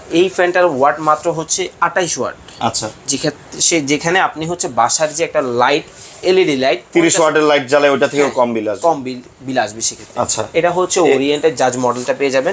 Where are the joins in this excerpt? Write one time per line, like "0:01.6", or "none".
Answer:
none